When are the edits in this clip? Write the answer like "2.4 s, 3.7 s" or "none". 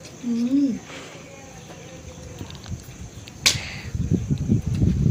none